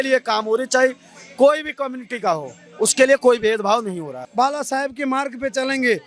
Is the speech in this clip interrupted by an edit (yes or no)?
yes